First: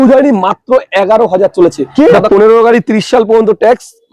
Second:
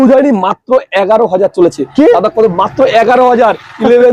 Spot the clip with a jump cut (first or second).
first